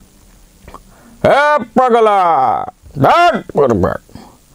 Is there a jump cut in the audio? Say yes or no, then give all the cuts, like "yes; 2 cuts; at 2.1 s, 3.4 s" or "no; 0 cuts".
no; 0 cuts